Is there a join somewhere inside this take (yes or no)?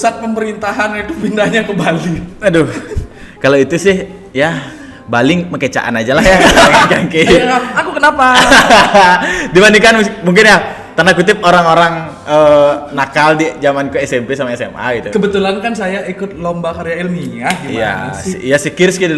yes